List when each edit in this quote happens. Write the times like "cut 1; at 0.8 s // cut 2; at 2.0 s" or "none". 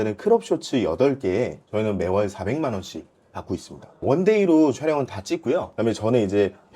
cut 1; at 4.0 s // cut 2; at 5.7 s